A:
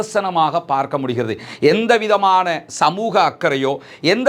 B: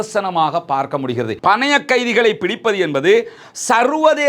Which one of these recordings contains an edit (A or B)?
B